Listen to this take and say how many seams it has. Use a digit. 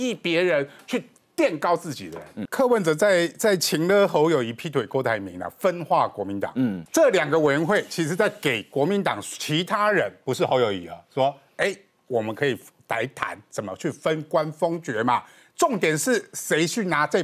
2